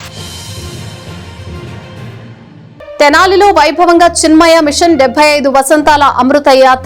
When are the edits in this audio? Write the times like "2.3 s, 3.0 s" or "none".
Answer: 2.2 s